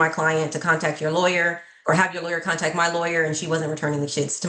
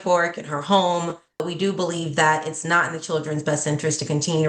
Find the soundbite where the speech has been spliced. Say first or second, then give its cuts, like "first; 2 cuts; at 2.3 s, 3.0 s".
second; 1 cut; at 1.4 s